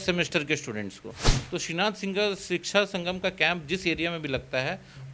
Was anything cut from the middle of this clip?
yes; 1 cut; at 1.3 s

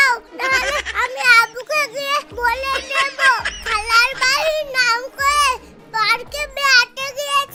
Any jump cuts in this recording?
no; 0 cuts

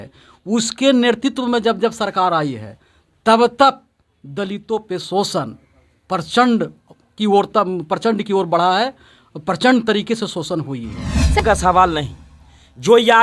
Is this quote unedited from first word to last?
no; 1 cut; at 11.4 s

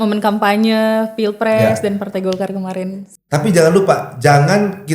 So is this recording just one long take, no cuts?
no; 1 cut; at 3.1 s

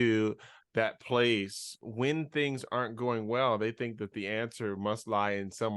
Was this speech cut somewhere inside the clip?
yes; 1 cut; at 1.8 s

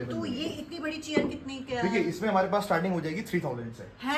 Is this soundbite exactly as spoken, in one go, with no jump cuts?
yes; 0 cuts

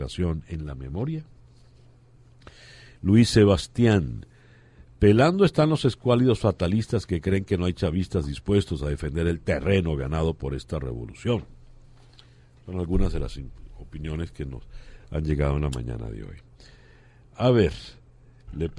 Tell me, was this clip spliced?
yes; 1 cut; at 16.6 s

